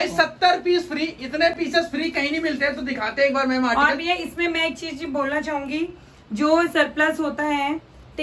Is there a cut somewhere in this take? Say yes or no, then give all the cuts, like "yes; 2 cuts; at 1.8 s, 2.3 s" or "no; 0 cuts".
no; 0 cuts